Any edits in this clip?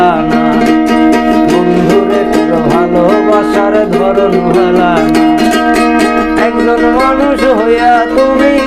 no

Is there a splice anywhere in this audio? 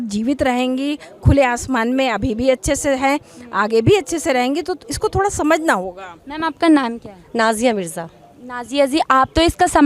yes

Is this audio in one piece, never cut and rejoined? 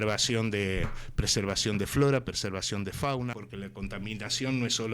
no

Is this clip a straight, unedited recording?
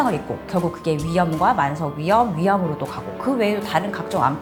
yes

